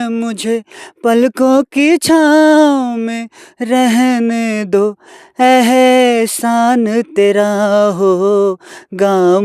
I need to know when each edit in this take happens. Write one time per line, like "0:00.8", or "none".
none

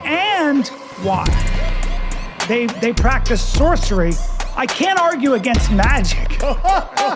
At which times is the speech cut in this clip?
none

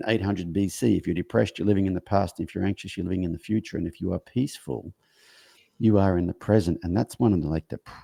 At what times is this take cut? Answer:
none

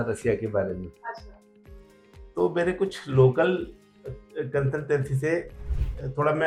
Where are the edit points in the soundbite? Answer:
none

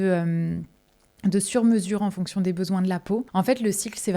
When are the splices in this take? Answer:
0:03.3

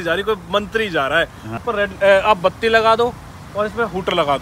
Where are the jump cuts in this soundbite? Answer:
0:01.6

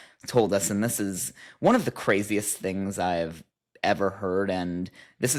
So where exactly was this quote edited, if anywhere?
none

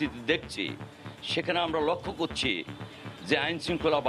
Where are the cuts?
none

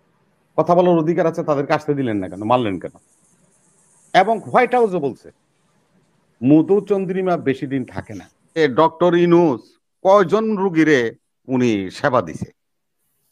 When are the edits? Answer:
0:08.6

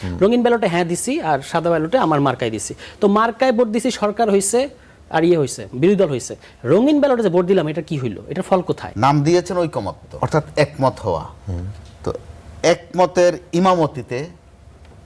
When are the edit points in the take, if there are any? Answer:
0:08.9
0:10.0

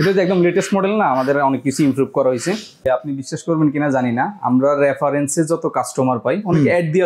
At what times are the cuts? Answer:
0:02.8

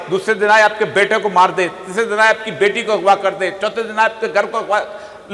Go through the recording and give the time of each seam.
none

